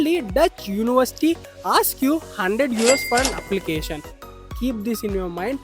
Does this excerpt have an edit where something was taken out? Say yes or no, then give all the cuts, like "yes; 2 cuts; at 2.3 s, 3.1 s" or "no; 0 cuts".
yes; 1 cut; at 4.2 s